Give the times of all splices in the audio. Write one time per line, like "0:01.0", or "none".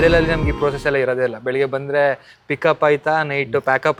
none